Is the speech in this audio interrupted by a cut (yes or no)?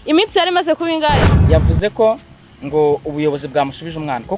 yes